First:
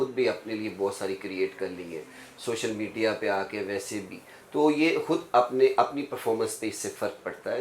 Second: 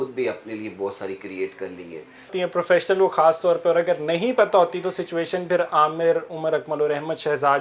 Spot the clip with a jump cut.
second; 1 cut; at 2.3 s

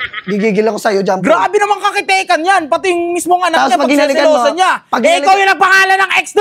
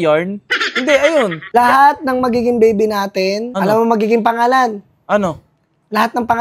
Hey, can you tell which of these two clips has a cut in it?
second; 2 cuts; at 1.5 s, 3.5 s

